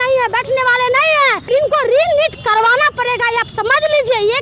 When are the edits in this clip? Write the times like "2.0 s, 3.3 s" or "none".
1.4 s